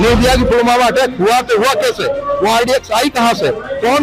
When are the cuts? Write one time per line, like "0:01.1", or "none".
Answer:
none